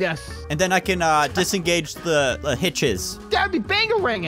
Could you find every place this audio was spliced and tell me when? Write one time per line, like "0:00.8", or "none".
0:01.3
0:02.4